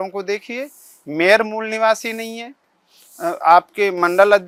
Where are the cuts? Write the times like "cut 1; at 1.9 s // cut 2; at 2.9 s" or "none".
none